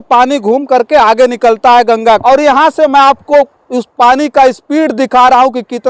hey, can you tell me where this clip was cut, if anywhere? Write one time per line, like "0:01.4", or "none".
0:02.2

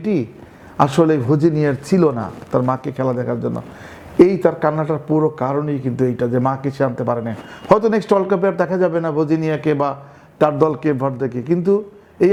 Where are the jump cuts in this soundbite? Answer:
none

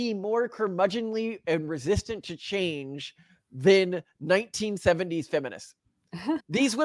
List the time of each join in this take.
none

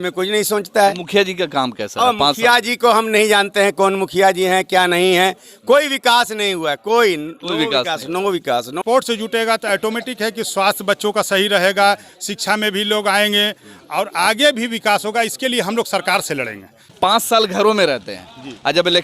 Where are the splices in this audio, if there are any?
0:08.8
0:16.9

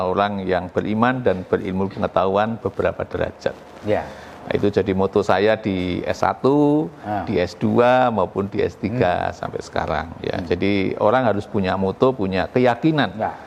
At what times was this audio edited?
none

